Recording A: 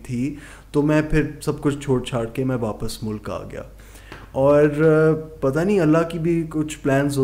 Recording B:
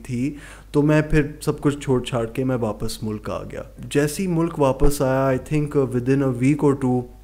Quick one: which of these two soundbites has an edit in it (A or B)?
B